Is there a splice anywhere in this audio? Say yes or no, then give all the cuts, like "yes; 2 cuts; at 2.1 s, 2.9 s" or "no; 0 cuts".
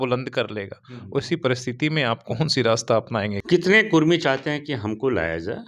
yes; 1 cut; at 3.4 s